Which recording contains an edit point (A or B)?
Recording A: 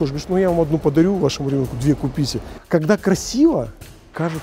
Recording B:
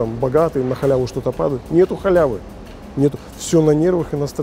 A